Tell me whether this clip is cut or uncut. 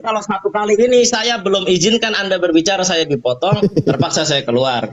uncut